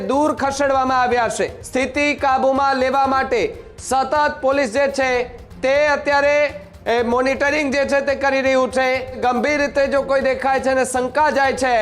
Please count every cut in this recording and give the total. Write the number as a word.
two